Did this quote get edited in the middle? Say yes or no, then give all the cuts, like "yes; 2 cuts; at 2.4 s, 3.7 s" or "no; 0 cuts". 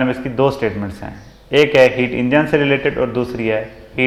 no; 0 cuts